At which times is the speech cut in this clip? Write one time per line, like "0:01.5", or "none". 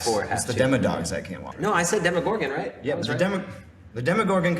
0:01.5